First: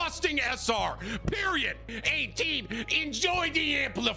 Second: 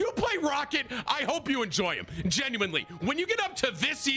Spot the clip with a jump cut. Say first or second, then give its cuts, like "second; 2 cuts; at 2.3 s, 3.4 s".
first; 1 cut; at 1.9 s